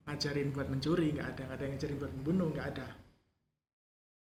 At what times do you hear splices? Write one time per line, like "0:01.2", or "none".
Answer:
none